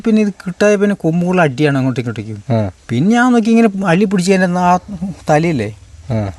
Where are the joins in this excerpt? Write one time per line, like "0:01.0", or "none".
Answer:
0:02.8